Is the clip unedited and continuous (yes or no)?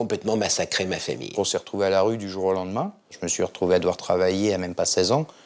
no